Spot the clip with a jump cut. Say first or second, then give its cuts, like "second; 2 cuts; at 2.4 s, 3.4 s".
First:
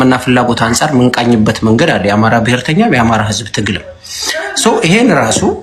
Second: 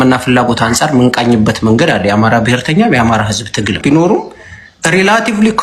second; 1 cut; at 3.8 s